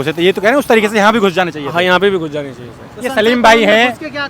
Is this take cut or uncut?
uncut